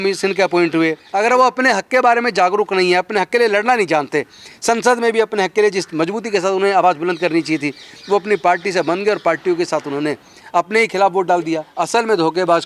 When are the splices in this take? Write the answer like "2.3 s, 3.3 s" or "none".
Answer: 1.0 s, 11.7 s